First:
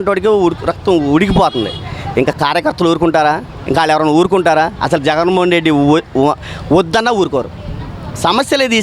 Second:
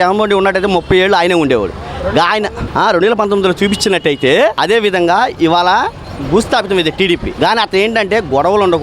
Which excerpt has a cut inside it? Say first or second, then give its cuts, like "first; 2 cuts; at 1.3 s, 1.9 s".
second; 3 cuts; at 2.6 s, 4.6 s, 7.3 s